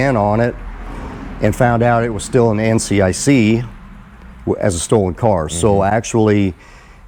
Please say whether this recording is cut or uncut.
uncut